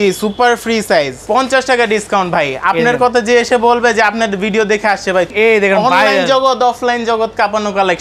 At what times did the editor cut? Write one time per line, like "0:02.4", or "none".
0:01.2
0:05.3